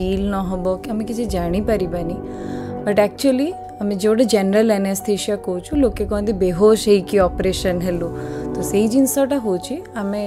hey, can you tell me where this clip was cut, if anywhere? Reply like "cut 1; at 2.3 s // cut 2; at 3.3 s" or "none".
none